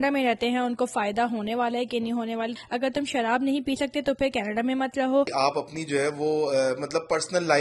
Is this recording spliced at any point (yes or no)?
yes